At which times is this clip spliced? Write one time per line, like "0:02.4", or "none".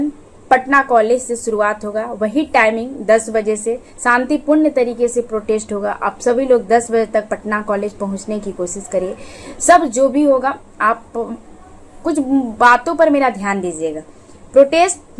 none